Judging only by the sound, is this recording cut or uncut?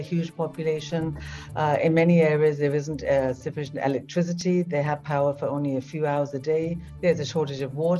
cut